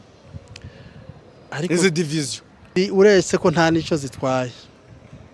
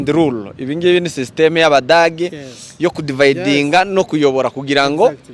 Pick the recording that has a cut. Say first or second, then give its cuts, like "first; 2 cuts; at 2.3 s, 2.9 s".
first; 1 cut; at 2.7 s